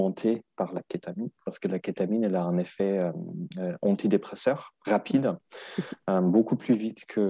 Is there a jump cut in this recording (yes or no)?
yes